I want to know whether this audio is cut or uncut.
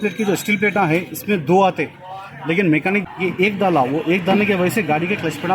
cut